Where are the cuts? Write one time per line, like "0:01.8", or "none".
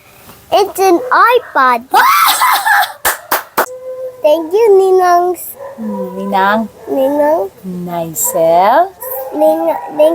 0:03.7